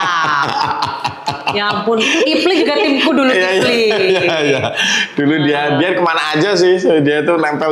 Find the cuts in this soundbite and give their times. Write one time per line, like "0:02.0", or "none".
none